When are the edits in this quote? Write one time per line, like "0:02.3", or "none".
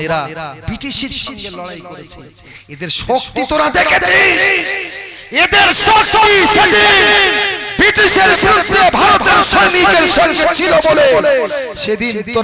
none